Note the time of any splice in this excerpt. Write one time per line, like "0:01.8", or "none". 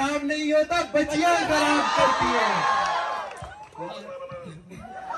none